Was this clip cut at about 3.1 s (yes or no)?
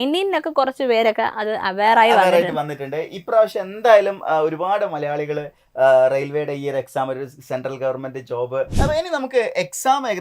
no